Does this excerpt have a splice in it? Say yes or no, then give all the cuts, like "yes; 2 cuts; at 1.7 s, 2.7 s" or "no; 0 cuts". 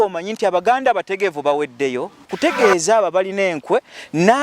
yes; 1 cut; at 2.3 s